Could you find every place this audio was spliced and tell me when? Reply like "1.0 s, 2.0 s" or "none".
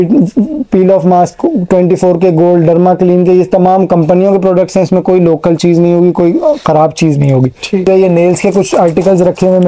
7.8 s

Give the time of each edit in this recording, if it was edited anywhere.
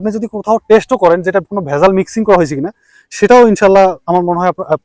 none

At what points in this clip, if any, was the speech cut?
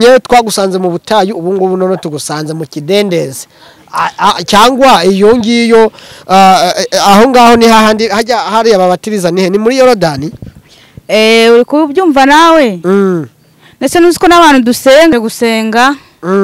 15.1 s

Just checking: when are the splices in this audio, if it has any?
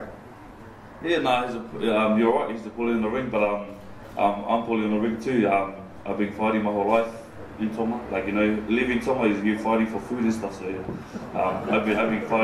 11.2 s

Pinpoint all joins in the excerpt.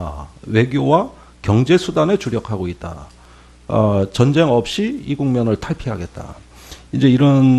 none

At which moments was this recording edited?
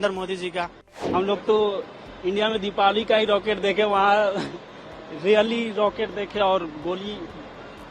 1.0 s

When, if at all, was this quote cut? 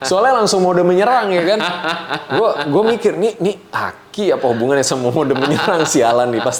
none

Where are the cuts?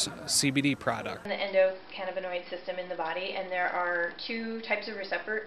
1.3 s

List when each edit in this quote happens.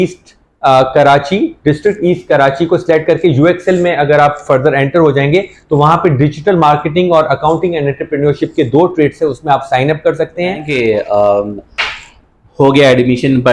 10.7 s

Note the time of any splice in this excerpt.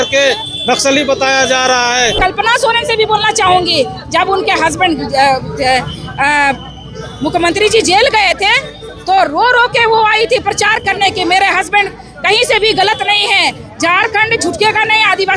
2.2 s

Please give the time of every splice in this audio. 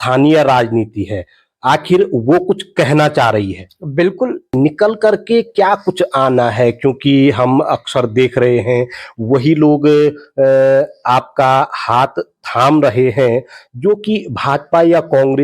4.5 s

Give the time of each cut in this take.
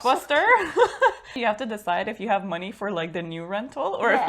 1.3 s

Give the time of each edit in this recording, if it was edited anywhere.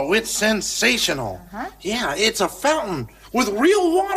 none

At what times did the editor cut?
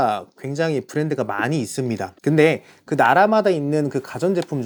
none

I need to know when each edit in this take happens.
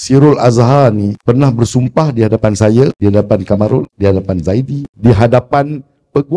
1.2 s, 3.0 s, 3.9 s, 4.8 s

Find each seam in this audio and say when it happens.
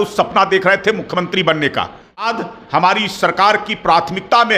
2.1 s

